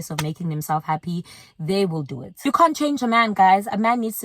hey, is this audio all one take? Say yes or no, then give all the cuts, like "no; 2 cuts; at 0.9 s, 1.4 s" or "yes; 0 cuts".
no; 1 cut; at 2.4 s